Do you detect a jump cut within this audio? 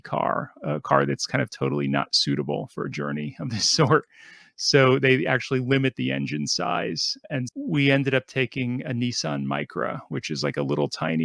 no; 0 cuts

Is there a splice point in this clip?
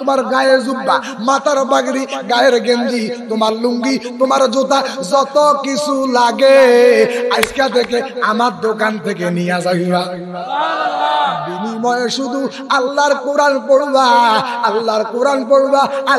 no; 0 cuts

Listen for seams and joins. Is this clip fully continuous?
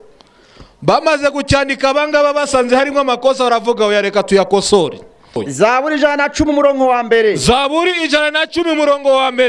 no; 1 cut; at 5.5 s

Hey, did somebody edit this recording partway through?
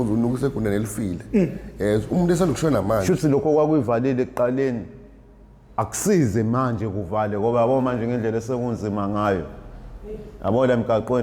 yes; 1 cut; at 3.0 s

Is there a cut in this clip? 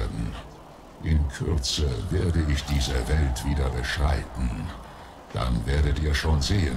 no; 0 cuts

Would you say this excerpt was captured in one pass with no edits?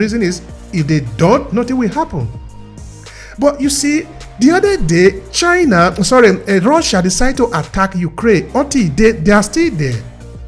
yes; 0 cuts

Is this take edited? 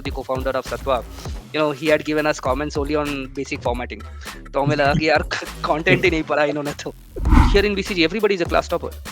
yes; 1 cut; at 7.3 s

